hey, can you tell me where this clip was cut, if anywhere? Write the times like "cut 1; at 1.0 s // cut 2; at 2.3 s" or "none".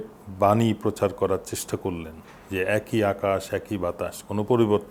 none